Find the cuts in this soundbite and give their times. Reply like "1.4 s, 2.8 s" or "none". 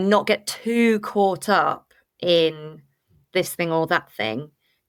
none